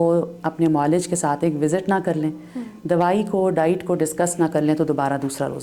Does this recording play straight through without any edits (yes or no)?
yes